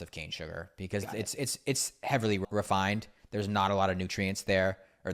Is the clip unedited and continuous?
no; 1 cut; at 2.4 s

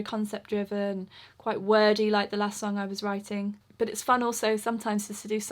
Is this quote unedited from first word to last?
no; 1 cut; at 3.7 s

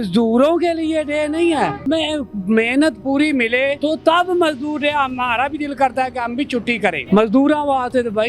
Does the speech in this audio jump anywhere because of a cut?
yes; 3 cuts; at 1.9 s, 3.8 s, 7.0 s

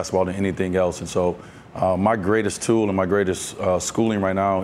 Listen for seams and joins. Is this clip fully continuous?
yes; 0 cuts

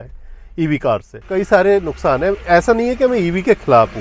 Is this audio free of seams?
no; 1 cut; at 1.2 s

